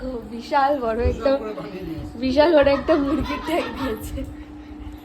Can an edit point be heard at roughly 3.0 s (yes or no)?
no